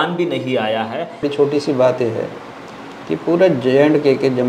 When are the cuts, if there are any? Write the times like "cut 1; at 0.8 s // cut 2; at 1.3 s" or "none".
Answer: cut 1; at 1.2 s